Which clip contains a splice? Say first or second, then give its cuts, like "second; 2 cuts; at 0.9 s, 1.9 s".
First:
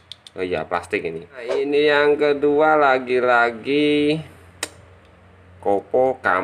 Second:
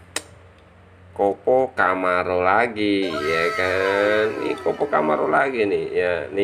first; 1 cut; at 1.6 s